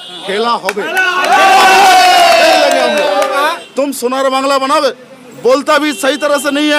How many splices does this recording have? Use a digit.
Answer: 1